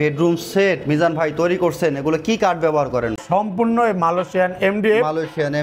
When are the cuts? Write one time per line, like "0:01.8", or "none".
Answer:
0:03.2